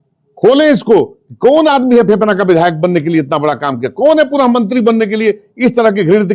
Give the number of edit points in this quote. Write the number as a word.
zero